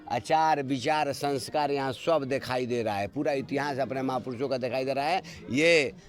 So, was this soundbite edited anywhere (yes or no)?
no